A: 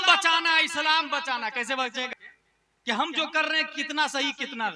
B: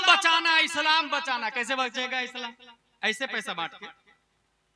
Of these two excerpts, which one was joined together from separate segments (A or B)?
A